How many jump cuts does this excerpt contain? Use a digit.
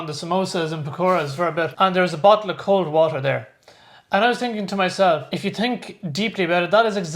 2